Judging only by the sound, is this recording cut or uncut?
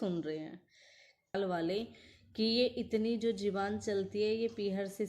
cut